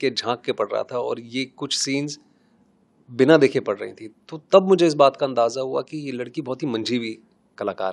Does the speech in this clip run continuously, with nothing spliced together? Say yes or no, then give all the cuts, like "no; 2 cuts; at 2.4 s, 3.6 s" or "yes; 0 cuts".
yes; 0 cuts